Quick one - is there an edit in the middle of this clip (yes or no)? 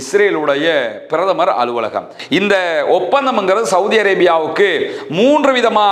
yes